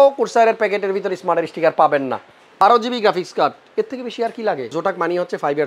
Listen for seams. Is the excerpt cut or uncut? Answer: cut